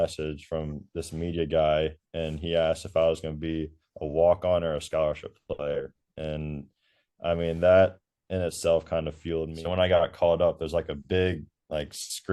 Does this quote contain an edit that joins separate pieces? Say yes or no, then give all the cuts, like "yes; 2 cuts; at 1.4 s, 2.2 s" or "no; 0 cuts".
yes; 1 cut; at 9.8 s